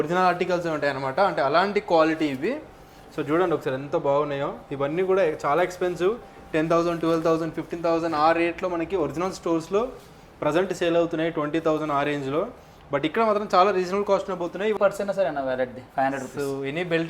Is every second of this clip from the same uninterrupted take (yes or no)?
no